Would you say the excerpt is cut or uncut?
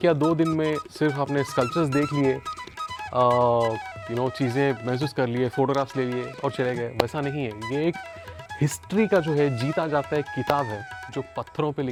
uncut